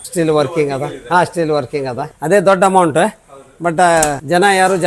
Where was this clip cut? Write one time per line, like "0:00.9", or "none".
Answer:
0:02.1